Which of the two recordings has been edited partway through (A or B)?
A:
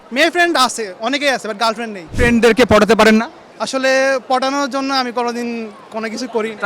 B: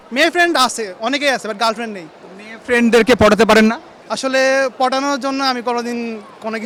A